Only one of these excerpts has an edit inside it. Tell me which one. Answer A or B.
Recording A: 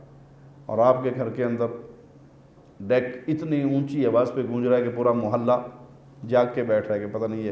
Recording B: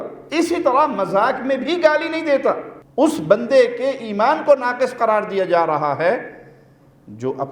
B